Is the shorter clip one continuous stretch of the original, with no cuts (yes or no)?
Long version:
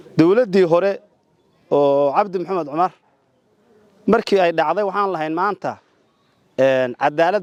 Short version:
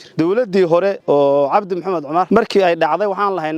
no